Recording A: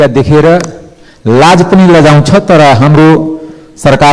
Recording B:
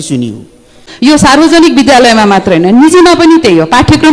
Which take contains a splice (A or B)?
B